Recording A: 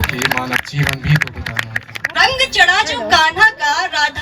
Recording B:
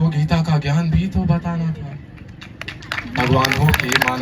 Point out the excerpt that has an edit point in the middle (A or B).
A